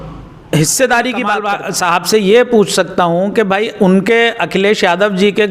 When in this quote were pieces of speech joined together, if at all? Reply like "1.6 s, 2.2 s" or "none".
1.4 s

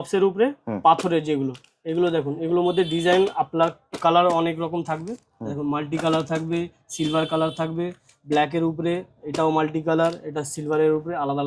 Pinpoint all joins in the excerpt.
none

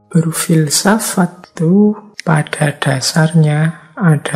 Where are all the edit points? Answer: 1.4 s, 2.1 s

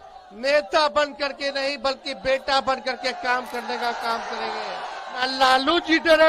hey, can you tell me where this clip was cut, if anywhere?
5.2 s

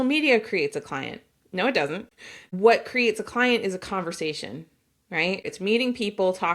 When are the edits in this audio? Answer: 2.5 s, 5.5 s

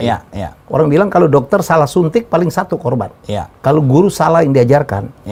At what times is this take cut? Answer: none

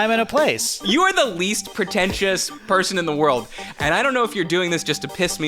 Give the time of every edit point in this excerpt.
0.8 s, 1.6 s

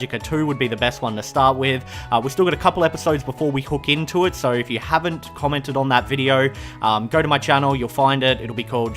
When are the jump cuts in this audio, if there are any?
4.8 s

